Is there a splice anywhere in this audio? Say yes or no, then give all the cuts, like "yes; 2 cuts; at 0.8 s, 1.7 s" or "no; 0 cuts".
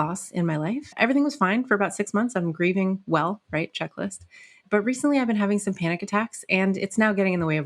yes; 2 cuts; at 0.9 s, 4.6 s